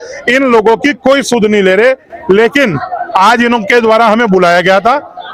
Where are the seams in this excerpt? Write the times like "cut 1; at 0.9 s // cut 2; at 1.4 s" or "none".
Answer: none